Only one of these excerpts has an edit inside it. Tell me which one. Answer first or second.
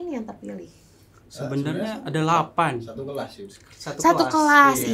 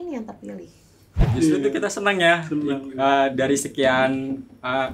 second